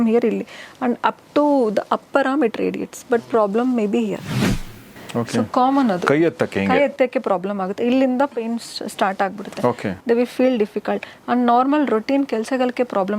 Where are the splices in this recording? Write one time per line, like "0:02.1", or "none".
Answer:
0:04.6